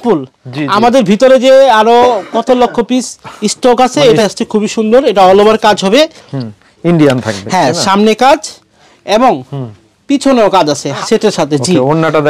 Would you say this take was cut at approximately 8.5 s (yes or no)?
no